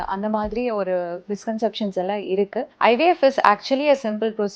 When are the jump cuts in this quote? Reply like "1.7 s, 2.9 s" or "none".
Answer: 2.7 s